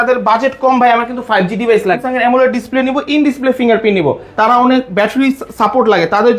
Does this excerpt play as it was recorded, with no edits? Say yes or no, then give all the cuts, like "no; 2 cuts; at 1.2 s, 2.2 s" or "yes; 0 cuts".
no; 2 cuts; at 2.0 s, 4.2 s